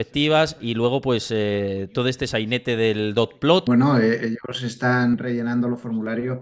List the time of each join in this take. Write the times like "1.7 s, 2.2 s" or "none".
3.6 s, 5.1 s